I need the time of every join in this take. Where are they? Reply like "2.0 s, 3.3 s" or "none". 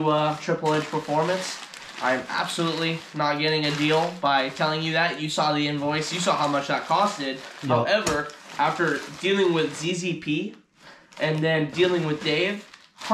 none